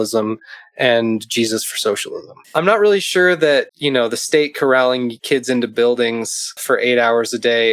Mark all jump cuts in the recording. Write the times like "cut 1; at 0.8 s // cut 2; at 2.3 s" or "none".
cut 1; at 2.3 s // cut 2; at 3.8 s // cut 3; at 5.2 s // cut 4; at 6.6 s